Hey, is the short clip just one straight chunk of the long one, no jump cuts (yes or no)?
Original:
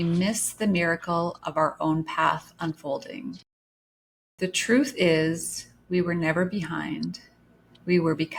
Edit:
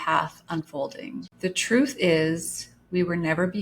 no